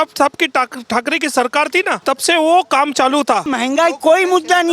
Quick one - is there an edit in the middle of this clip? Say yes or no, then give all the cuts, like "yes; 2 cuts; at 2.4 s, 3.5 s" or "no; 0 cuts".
yes; 2 cuts; at 2.0 s, 3.5 s